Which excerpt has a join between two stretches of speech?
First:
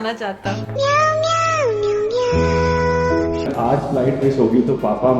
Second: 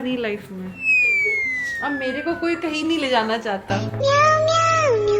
first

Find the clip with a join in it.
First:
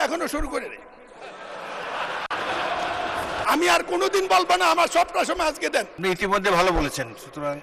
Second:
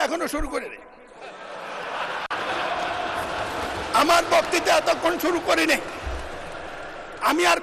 first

